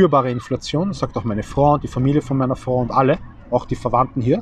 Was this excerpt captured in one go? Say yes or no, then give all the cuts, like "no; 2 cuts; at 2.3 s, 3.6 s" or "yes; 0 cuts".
yes; 0 cuts